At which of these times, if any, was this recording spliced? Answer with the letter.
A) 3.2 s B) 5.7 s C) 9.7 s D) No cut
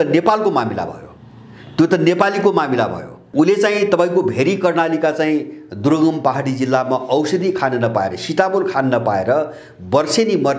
A